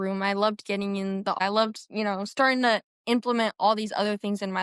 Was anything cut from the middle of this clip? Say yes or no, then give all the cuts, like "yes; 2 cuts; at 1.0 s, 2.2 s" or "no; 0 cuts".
yes; 1 cut; at 1.4 s